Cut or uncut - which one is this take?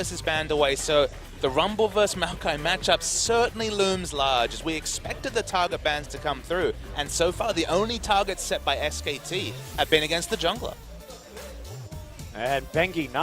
cut